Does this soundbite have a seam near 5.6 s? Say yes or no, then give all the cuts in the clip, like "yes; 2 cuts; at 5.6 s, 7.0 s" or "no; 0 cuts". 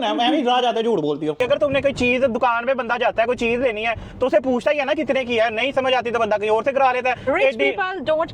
no; 1 cut; at 1.4 s